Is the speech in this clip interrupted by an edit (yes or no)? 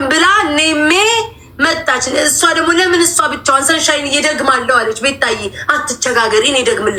no